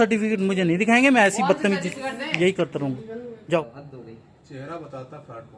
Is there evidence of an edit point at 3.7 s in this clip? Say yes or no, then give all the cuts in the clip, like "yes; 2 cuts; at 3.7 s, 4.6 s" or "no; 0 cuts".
yes; 1 cut; at 3.7 s